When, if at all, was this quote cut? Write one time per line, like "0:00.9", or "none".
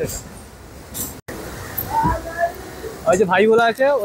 0:01.2

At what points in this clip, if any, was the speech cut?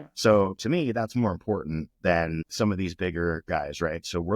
0:02.5

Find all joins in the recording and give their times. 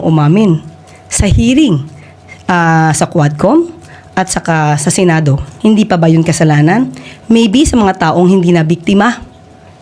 0:05.5

